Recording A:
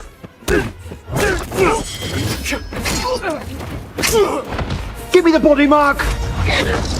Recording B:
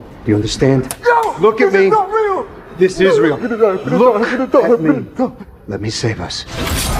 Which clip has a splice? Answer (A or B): A